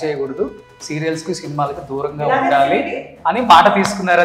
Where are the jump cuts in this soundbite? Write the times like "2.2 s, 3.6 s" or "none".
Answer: none